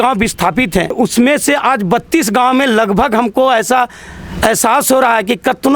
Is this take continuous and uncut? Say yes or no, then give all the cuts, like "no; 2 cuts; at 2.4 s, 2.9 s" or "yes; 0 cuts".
no; 1 cut; at 0.9 s